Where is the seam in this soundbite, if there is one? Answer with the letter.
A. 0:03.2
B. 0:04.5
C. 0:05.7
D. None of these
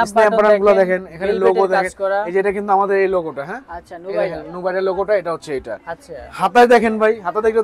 D